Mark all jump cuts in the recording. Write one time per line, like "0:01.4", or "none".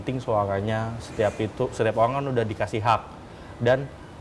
none